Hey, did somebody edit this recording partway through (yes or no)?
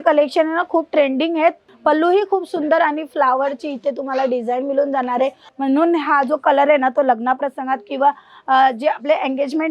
yes